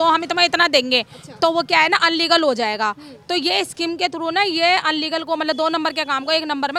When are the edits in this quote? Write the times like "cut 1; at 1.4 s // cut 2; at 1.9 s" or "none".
none